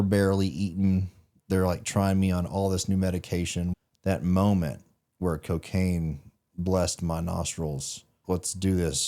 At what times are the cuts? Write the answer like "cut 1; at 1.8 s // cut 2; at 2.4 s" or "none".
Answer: cut 1; at 3.7 s // cut 2; at 8.2 s